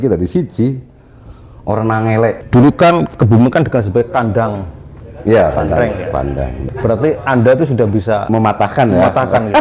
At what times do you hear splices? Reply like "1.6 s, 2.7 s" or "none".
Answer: 2.4 s, 6.6 s, 8.3 s